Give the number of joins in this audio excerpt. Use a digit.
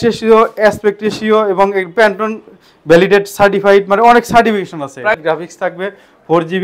1